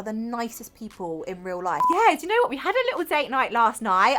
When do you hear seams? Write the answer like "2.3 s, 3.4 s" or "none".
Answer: 1.8 s